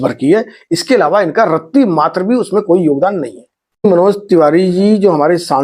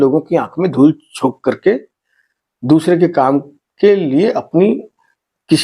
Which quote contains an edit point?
first; 1 cut; at 3.8 s

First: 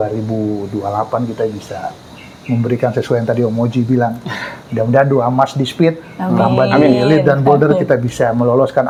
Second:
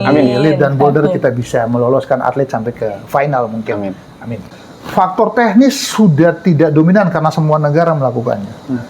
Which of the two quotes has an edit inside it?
second; 1 cut; at 4.5 s

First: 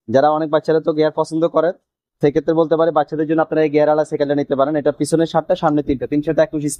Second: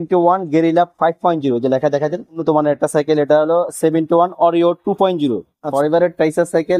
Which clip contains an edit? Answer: second; 2 cuts; at 2.4 s, 5.7 s

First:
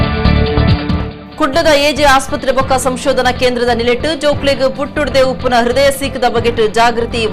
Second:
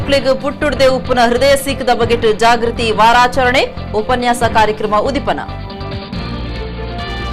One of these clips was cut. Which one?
first; 1 cut; at 1.1 s

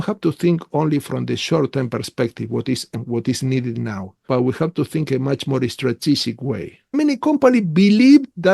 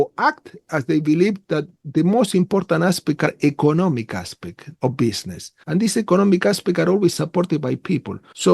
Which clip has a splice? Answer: first; 1 cut; at 6.9 s

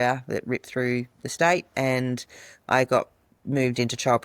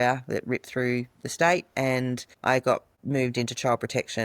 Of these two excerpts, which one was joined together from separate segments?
second; 2 cuts; at 2.3 s, 2.9 s

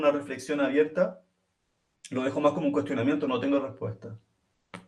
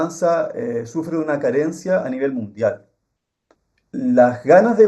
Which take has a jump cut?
second; 1 cut; at 3.5 s

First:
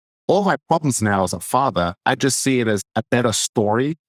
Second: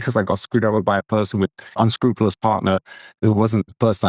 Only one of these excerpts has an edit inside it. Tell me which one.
second; 2 cuts; at 1.7 s, 3.1 s

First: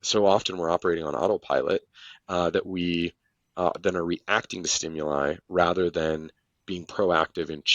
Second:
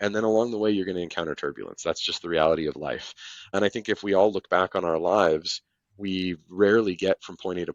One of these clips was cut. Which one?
second; 1 cut; at 3.5 s

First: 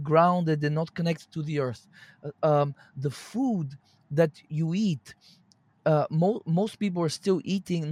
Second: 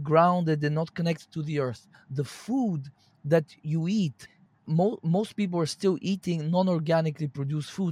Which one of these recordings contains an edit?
second; 2 cuts; at 2.0 s, 4.7 s

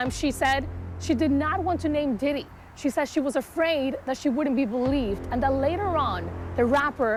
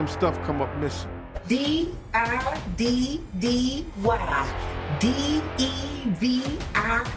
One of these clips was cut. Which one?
second; 1 cut; at 1.3 s

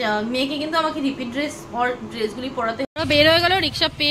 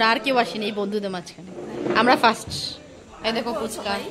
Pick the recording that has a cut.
first; 1 cut; at 2.9 s

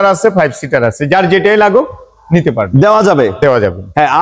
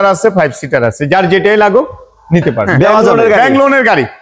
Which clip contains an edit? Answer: second; 1 cut; at 3.1 s

